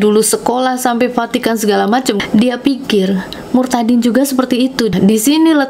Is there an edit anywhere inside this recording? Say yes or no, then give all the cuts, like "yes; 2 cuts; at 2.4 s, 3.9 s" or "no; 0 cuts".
yes; 2 cuts; at 2.2 s, 4.9 s